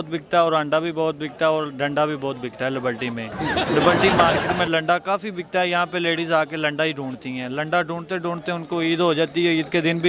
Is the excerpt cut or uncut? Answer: uncut